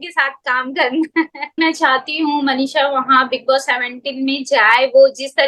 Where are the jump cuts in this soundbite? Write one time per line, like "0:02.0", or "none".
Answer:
0:01.6